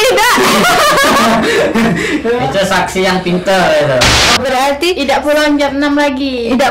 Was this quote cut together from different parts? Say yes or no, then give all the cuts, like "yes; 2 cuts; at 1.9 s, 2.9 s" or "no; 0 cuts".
yes; 1 cut; at 4.4 s